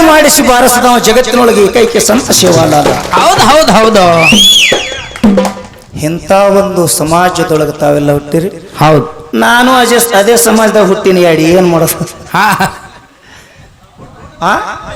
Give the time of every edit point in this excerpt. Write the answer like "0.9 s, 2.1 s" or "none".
none